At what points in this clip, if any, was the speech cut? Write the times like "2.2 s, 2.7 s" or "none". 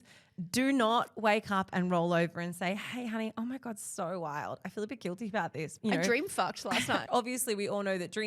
5.7 s, 7.0 s